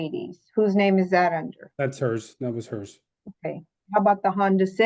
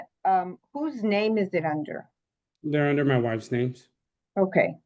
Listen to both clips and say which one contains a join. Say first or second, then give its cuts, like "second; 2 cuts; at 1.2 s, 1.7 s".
first; 1 cut; at 3.7 s